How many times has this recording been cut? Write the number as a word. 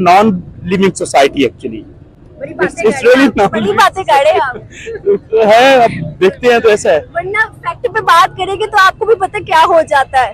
zero